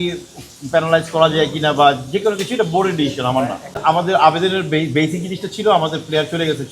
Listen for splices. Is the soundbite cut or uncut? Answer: cut